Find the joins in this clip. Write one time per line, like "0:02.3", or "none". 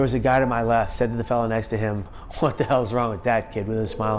0:00.9
0:02.1